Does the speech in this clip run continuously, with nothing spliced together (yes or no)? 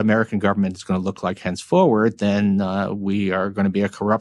yes